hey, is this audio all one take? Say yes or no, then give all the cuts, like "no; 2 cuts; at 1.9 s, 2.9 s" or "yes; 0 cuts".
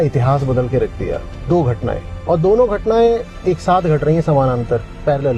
yes; 0 cuts